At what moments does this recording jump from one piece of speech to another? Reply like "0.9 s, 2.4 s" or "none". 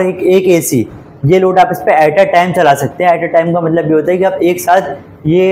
none

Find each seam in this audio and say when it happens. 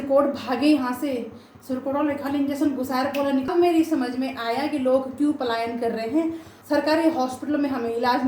3.5 s, 6.5 s

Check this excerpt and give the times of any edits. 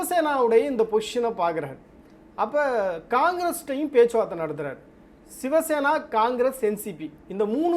none

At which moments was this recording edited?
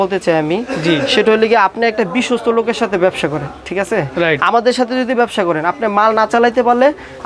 none

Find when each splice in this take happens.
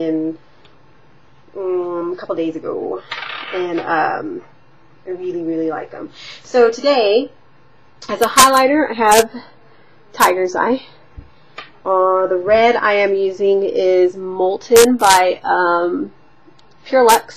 none

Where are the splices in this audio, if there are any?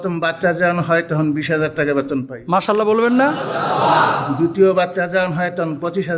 none

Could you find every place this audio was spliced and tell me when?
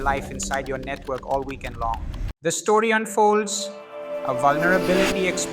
2.2 s

